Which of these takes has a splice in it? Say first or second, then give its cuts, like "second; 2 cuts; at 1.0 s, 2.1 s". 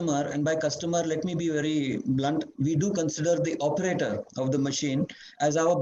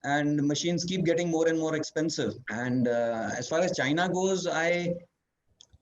second; 1 cut; at 2.5 s